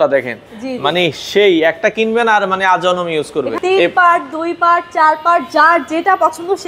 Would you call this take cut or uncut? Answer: cut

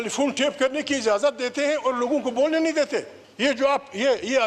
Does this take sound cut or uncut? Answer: cut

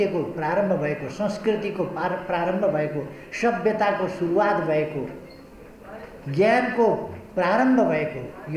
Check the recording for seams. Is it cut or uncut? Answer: uncut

